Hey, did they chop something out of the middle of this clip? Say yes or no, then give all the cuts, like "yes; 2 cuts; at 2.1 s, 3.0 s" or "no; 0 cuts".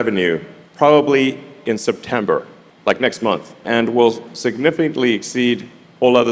yes; 1 cut; at 3.6 s